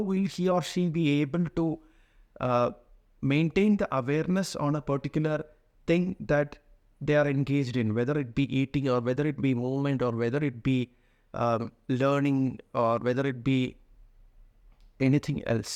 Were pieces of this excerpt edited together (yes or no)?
no